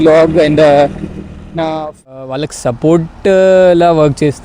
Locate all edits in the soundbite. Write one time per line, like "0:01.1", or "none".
0:02.1